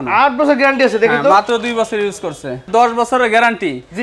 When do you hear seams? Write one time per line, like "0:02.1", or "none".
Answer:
none